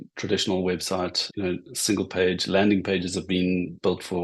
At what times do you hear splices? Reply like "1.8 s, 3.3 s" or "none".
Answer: 1.2 s